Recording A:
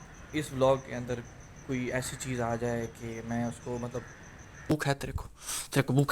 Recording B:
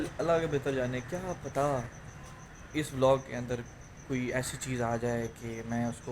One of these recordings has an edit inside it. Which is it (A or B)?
A